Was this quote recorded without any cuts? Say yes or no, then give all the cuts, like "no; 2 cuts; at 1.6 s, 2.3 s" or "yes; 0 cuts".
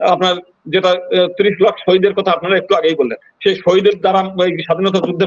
yes; 0 cuts